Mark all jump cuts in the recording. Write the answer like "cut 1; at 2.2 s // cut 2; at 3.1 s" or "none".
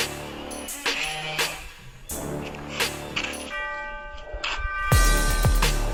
none